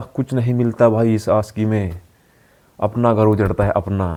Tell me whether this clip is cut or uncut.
uncut